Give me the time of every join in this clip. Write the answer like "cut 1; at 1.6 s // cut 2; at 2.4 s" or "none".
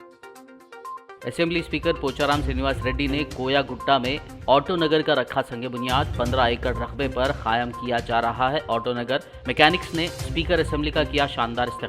none